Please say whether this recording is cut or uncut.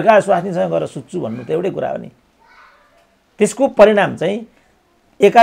uncut